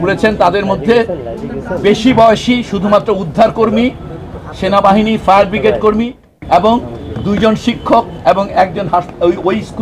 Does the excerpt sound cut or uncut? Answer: uncut